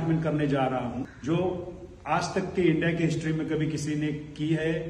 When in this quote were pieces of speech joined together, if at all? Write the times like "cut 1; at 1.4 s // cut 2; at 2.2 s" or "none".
cut 1; at 1.1 s